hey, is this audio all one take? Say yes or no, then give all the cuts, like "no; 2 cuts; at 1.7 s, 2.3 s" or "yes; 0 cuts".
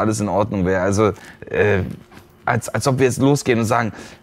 yes; 0 cuts